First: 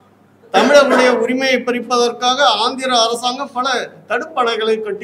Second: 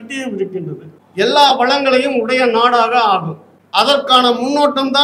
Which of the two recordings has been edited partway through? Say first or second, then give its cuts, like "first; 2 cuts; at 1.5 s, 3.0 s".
second; 1 cut; at 1.0 s